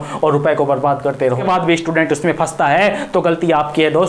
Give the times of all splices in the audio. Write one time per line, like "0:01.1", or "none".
0:01.4